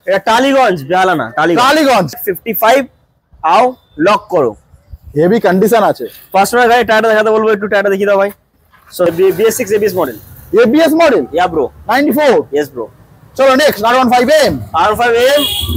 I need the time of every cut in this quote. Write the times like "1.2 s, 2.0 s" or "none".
2.2 s, 9.1 s

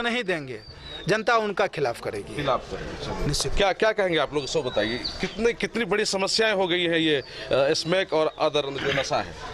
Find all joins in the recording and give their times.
none

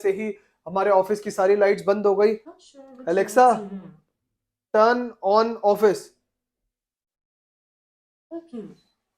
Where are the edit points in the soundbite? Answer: 2.6 s

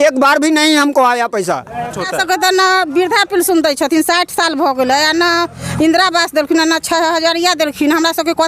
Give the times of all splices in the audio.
2.0 s

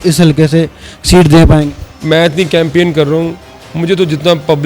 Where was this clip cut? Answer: 1.9 s

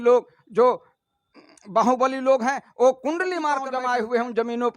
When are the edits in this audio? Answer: 3.7 s

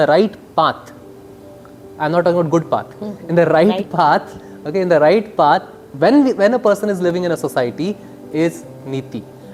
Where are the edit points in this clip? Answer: none

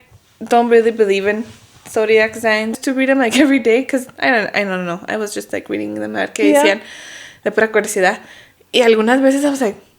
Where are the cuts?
2.8 s

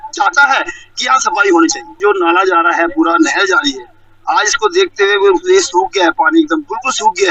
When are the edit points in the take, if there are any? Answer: 2.0 s

